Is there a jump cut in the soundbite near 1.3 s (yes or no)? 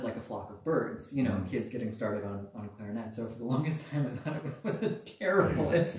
no